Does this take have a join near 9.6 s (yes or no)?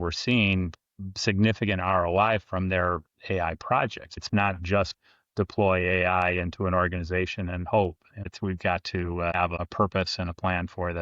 yes